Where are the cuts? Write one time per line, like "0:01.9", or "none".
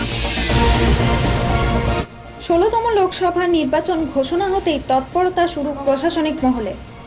0:02.2

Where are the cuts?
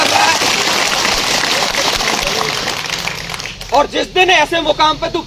none

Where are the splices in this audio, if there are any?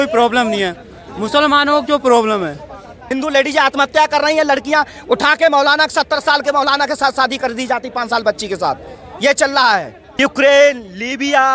0:03.0
0:10.0

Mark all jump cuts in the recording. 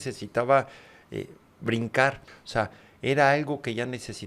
0:02.3

